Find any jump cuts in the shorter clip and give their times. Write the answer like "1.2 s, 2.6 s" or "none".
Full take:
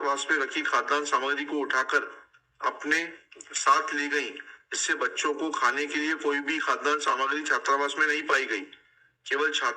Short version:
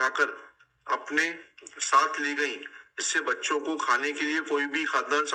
none